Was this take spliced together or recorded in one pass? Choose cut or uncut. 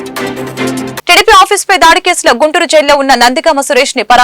cut